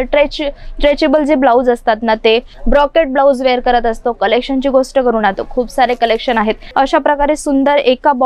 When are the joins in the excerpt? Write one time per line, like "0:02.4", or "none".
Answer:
0:02.5
0:06.6